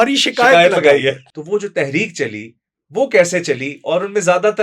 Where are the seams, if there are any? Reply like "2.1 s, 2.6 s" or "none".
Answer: 1.3 s